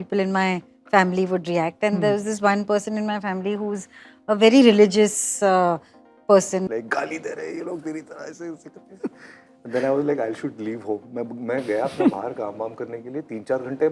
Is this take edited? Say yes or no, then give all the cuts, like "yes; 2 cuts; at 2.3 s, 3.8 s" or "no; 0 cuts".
yes; 1 cut; at 6.7 s